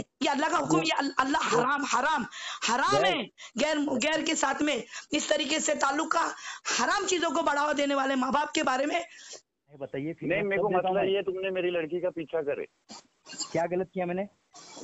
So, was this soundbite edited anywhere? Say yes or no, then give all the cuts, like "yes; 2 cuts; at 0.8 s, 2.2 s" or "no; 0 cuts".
yes; 1 cut; at 9.8 s